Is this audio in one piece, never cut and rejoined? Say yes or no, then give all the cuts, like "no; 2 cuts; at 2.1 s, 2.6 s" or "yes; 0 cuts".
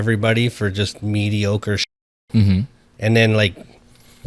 yes; 0 cuts